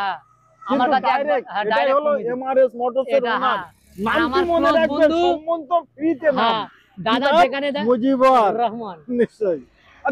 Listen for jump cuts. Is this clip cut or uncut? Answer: uncut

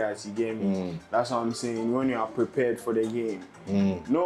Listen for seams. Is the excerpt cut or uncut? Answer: uncut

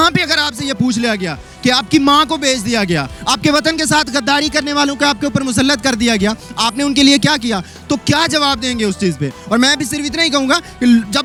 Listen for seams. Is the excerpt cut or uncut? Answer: uncut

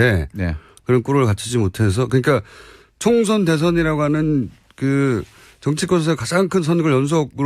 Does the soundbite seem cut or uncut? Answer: cut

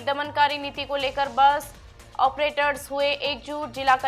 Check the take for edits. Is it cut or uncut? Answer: uncut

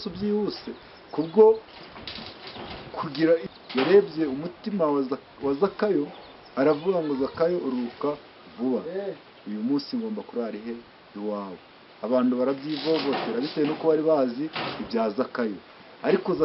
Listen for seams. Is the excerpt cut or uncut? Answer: cut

